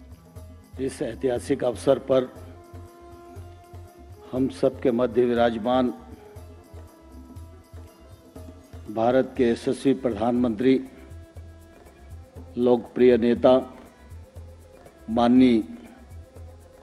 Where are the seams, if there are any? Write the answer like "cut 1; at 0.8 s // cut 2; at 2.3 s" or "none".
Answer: cut 1; at 2.3 s // cut 2; at 4.3 s // cut 3; at 6.2 s // cut 4; at 8.4 s